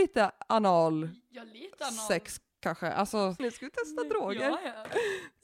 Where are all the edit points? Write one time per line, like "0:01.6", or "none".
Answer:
0:03.4